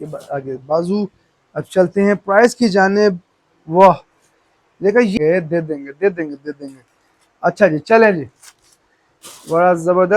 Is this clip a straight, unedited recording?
no; 1 cut; at 5.2 s

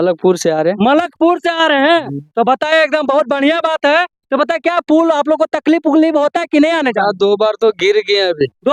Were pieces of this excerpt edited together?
no; 0 cuts

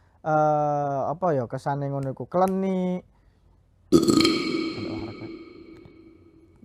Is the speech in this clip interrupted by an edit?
no; 0 cuts

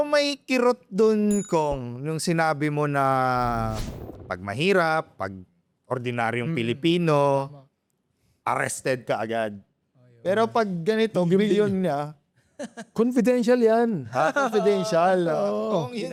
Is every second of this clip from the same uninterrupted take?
yes; 0 cuts

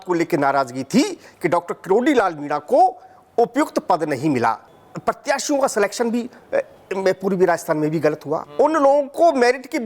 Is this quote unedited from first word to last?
no; 2 cuts; at 4.6 s, 8.4 s

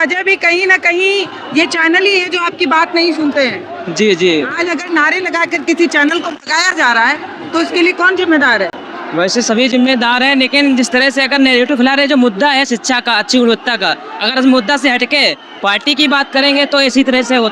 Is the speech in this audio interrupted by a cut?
no; 0 cuts

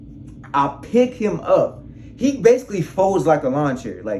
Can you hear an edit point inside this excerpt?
no; 0 cuts

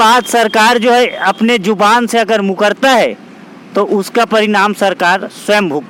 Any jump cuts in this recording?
no; 0 cuts

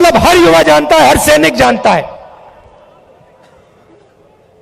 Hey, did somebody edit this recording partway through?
no; 0 cuts

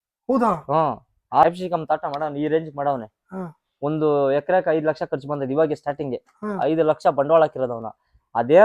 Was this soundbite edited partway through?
yes; 1 cut; at 1.4 s

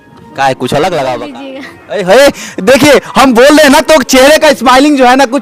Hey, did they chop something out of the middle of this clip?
yes; 1 cut; at 1.3 s

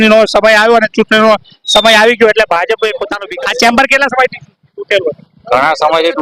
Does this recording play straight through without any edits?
no; 1 cut; at 3.2 s

